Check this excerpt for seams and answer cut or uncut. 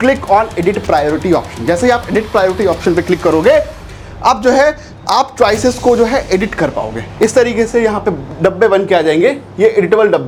uncut